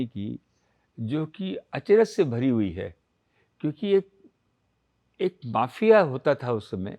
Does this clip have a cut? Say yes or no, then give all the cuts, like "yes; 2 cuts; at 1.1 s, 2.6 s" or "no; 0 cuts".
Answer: no; 0 cuts